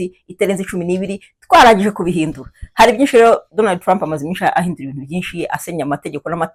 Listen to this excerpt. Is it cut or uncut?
uncut